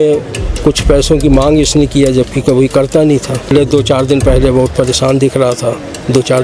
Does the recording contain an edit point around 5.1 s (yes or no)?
no